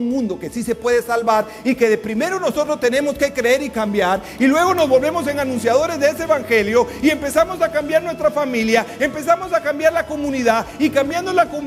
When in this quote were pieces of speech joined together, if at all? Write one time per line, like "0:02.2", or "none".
none